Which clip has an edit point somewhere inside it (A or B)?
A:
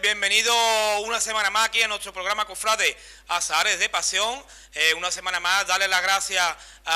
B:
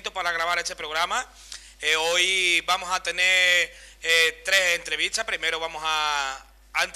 B